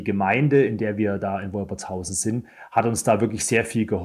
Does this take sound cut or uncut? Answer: uncut